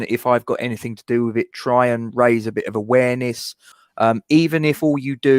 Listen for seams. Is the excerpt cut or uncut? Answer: cut